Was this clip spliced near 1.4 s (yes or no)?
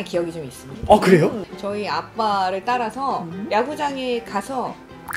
yes